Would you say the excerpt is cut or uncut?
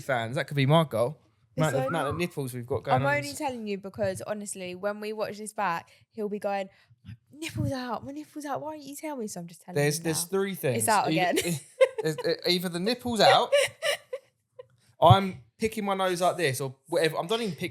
uncut